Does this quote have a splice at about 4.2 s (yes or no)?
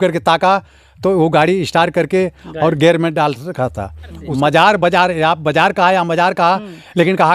yes